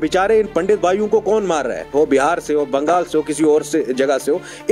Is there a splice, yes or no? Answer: yes